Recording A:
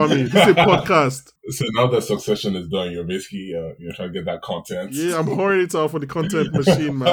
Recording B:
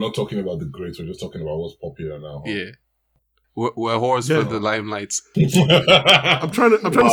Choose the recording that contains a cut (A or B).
A